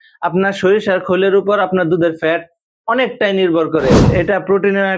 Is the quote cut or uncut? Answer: cut